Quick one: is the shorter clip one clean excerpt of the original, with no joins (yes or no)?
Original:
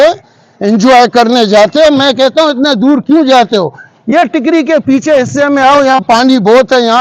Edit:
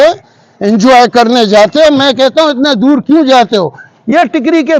yes